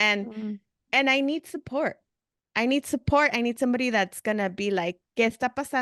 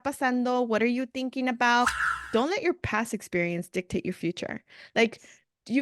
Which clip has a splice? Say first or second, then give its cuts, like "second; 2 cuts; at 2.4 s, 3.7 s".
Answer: second; 1 cut; at 2.2 s